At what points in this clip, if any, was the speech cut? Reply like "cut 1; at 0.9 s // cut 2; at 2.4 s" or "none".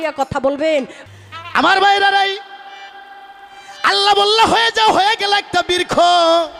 cut 1; at 1.0 s